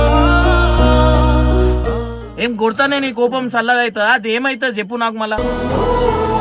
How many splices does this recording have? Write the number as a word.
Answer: one